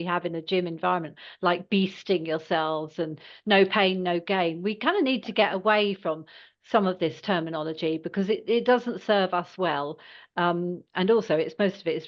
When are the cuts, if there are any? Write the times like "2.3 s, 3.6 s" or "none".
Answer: none